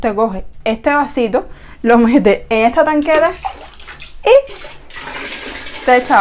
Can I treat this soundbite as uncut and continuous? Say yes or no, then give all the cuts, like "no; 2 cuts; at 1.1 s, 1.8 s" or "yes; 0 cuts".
yes; 0 cuts